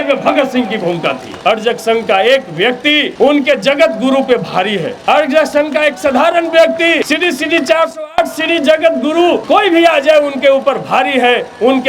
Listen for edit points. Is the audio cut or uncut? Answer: cut